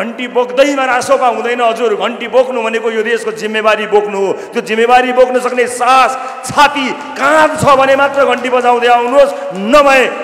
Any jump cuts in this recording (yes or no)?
no